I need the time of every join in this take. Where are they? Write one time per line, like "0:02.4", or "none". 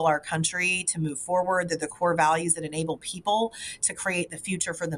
none